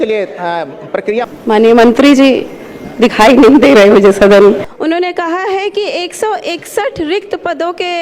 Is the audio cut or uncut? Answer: cut